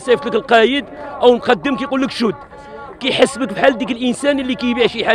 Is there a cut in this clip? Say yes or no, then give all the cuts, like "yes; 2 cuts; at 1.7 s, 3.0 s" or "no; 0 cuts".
no; 0 cuts